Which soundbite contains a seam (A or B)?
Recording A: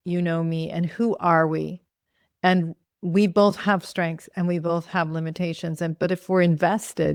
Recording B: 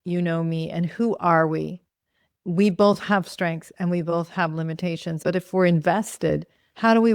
B